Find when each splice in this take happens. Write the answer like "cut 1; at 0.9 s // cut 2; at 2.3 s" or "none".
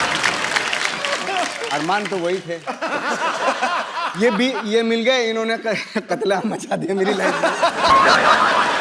none

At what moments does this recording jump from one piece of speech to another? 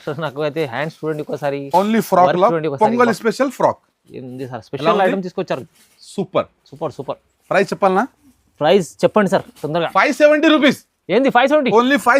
none

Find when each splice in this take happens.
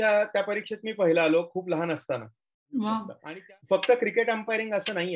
cut 1; at 3.2 s

